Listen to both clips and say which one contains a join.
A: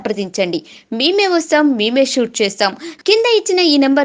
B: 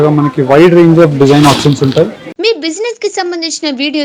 B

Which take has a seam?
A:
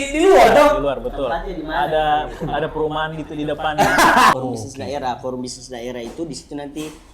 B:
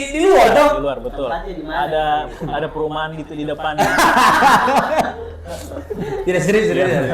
A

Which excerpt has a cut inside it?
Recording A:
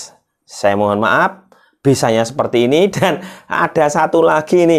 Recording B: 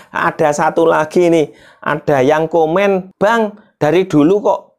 B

